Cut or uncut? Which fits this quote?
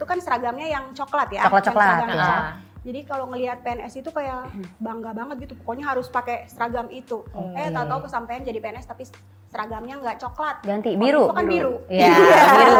uncut